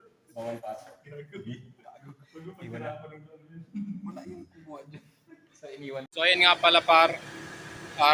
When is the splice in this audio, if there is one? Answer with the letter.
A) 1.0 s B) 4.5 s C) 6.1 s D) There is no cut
C